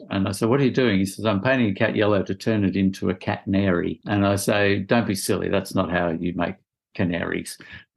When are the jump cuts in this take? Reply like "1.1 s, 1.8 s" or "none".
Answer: 4.0 s

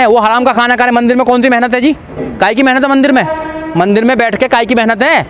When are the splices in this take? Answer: none

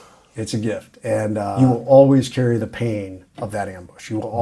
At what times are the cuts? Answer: 1.4 s

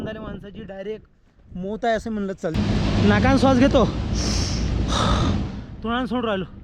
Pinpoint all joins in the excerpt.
2.5 s

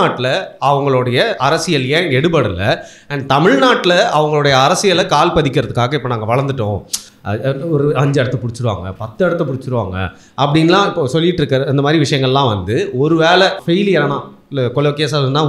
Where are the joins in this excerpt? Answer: 13.6 s

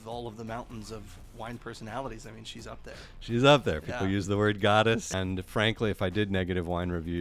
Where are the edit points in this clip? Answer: 5.1 s

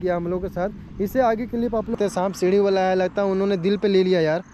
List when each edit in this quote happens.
1.9 s

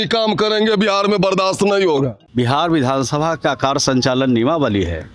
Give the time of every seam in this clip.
2.2 s

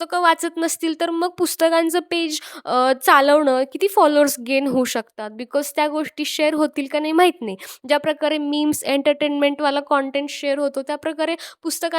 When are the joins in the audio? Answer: none

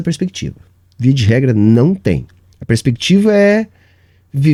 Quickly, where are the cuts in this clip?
none

